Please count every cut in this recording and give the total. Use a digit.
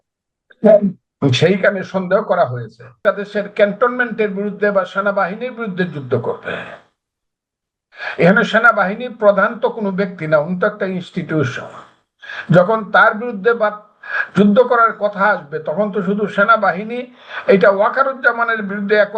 1